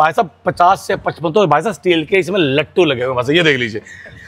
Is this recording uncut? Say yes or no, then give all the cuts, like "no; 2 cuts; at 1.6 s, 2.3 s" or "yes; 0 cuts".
yes; 0 cuts